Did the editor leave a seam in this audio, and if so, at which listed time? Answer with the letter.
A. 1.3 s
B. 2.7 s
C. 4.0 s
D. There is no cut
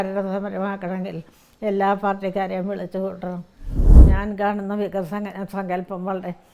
C